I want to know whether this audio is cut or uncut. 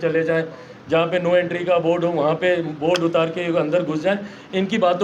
uncut